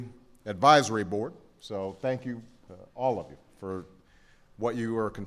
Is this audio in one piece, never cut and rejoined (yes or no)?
yes